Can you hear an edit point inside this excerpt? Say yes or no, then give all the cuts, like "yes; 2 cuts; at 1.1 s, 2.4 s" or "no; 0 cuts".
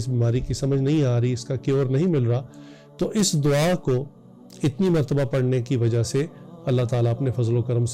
no; 0 cuts